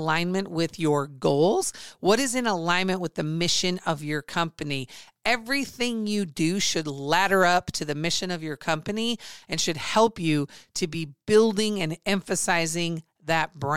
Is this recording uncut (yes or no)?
yes